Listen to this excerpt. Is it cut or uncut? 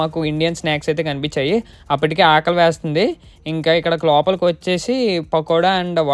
uncut